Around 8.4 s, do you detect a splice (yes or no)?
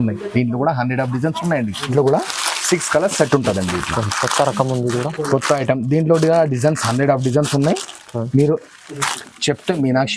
no